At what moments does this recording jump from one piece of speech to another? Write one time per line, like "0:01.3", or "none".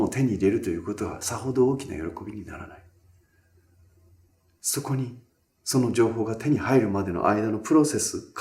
0:04.6